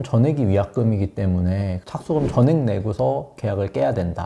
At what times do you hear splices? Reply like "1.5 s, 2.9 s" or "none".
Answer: none